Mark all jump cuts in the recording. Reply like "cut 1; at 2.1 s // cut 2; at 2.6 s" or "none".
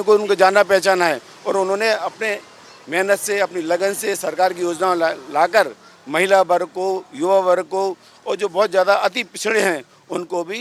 none